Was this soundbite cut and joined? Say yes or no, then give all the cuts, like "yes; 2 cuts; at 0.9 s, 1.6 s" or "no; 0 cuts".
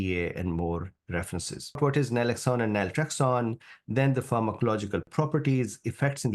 yes; 2 cuts; at 1.8 s, 5.1 s